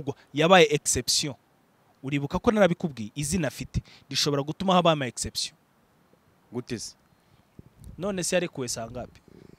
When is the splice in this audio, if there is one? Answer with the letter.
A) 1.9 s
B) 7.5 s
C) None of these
C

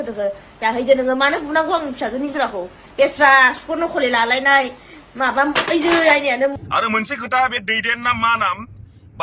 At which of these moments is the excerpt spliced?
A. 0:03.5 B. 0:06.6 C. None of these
B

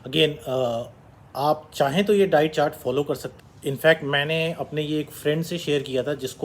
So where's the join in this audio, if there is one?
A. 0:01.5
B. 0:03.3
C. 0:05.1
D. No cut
B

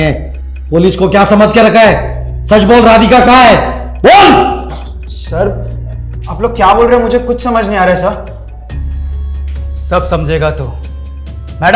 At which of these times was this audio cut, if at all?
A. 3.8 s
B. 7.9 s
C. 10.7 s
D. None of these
D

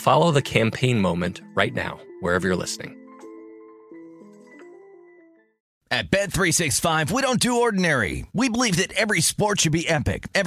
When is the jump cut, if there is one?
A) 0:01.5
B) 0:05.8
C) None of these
B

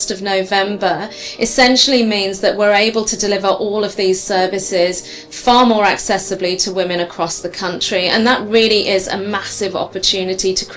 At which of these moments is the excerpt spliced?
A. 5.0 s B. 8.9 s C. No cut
C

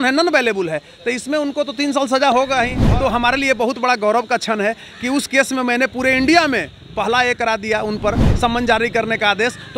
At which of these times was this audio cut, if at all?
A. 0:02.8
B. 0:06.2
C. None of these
A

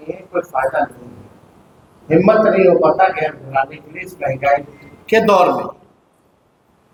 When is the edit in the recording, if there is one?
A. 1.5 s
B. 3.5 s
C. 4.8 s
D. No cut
D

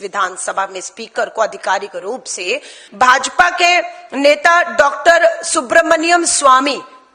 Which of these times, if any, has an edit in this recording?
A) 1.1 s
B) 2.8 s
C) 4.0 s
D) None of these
B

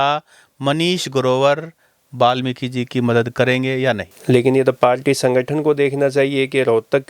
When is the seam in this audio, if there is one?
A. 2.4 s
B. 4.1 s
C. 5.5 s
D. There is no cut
B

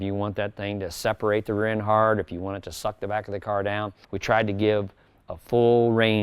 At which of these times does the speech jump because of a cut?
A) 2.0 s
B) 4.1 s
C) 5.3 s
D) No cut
B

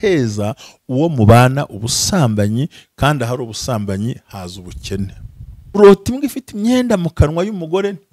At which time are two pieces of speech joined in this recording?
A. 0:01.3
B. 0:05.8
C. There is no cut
B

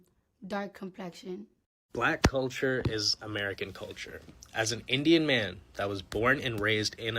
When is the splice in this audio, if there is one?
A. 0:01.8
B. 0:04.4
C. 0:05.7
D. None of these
A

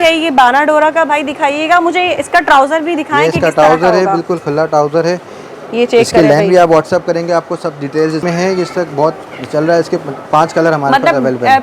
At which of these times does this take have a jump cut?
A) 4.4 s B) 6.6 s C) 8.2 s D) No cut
C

